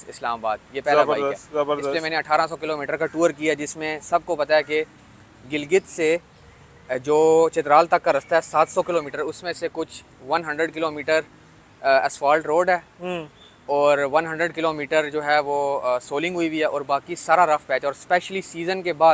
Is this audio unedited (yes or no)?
yes